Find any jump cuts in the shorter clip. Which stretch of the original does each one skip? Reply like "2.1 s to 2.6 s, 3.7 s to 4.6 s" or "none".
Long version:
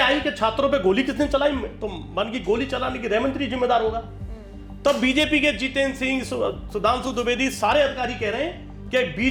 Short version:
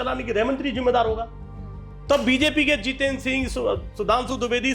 none